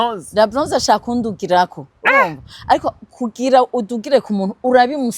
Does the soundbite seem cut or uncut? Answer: uncut